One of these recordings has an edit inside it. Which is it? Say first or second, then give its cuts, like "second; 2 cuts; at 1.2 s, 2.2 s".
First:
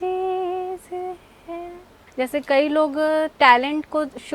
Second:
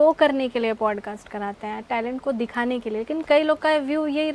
first; 1 cut; at 2.0 s